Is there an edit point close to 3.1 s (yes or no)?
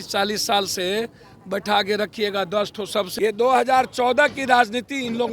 yes